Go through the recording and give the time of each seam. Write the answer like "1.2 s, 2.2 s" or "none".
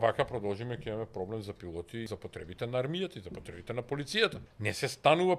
2.1 s, 4.5 s